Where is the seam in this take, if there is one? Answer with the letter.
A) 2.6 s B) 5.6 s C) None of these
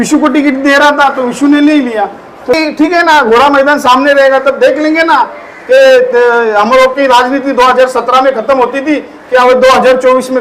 A